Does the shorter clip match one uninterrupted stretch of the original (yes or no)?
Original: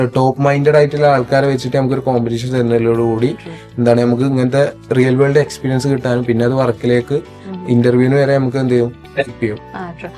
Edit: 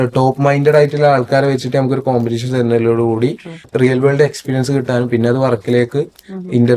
no